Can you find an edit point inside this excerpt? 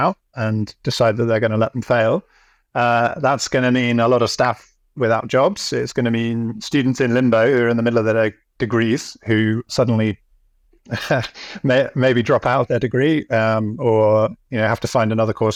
no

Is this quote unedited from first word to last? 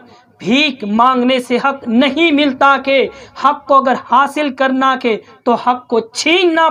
yes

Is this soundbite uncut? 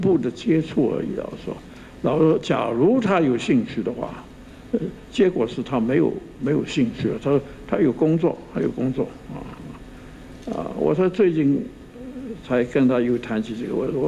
yes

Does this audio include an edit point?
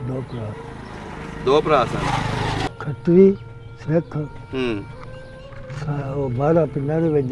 yes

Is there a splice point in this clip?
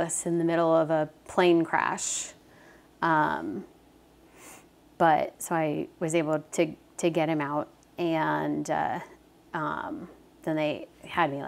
no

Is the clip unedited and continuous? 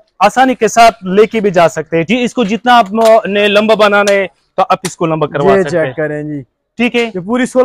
no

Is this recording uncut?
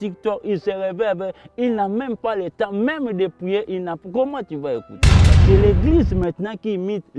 no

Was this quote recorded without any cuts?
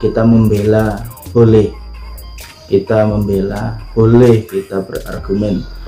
no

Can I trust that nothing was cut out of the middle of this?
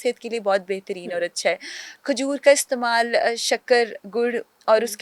yes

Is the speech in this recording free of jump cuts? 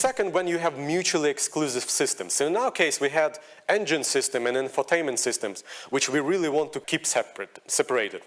no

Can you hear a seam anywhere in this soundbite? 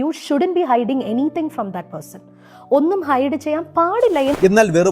no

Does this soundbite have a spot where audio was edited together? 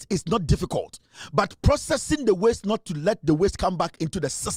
no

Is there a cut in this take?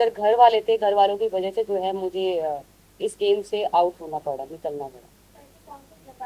no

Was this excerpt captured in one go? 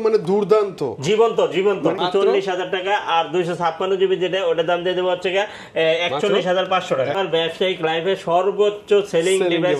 no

